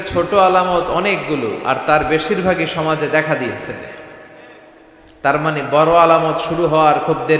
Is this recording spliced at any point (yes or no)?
no